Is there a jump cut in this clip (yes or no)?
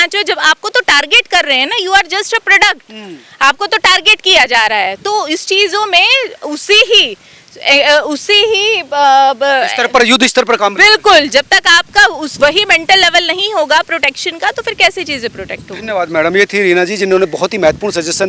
no